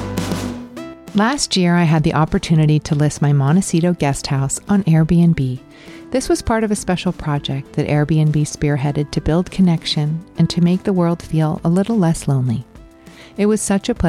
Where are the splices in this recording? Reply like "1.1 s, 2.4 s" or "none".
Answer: 1.0 s